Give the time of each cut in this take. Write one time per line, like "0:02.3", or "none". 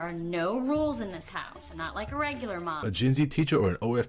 0:02.8